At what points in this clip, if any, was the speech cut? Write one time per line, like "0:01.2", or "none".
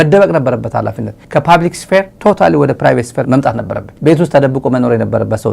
0:02.1